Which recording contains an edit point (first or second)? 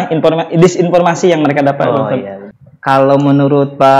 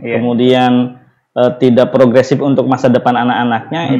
first